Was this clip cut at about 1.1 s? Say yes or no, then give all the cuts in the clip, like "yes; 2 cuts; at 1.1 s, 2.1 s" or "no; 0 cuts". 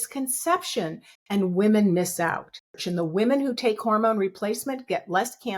no; 1 cut; at 2.8 s